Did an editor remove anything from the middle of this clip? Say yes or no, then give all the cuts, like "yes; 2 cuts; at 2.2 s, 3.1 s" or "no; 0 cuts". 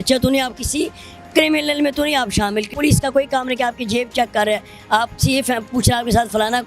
yes; 1 cut; at 2.7 s